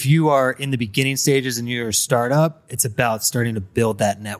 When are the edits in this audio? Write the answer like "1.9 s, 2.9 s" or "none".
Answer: none